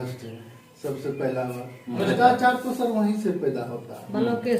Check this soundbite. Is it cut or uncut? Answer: cut